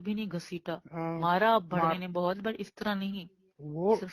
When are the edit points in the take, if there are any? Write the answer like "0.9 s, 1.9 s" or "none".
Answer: none